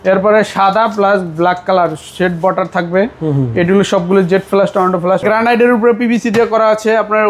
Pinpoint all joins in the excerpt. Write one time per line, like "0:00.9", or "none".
0:05.2